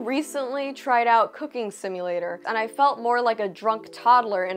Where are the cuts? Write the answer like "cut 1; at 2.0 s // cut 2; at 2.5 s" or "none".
cut 1; at 2.4 s